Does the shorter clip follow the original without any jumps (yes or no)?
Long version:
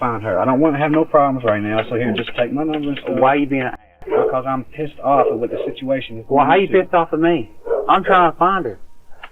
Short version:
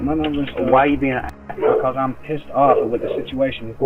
yes